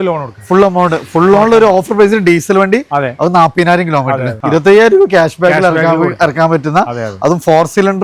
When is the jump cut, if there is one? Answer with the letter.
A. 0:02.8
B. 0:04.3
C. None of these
B